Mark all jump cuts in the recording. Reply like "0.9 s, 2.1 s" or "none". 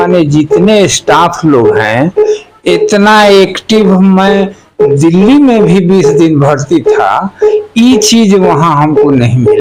none